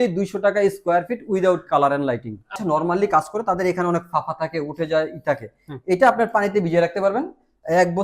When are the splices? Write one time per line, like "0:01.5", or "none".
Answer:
0:02.5